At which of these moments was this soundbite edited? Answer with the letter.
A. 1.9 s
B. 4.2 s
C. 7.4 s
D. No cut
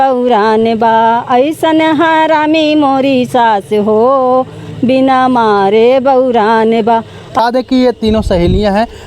C